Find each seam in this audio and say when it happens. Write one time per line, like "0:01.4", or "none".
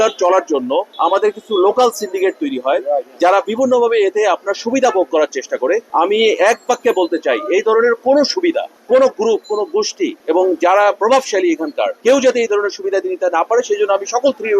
0:00.9